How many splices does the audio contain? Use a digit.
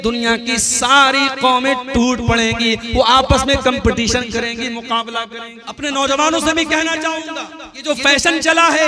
2